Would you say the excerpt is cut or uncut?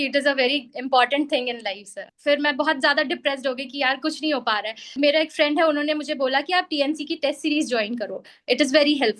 cut